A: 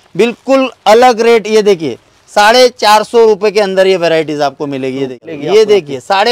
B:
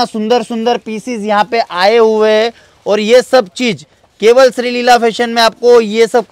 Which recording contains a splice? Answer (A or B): A